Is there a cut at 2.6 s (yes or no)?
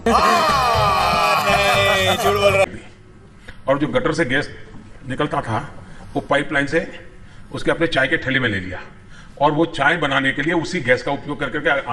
yes